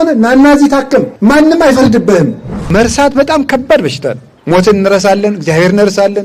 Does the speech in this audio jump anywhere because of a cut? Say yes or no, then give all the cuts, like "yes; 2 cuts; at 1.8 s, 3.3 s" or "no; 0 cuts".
yes; 3 cuts; at 1.1 s, 2.7 s, 4.3 s